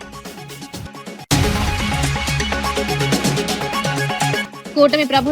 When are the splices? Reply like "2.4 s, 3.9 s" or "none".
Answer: 1.3 s, 2.6 s, 4.0 s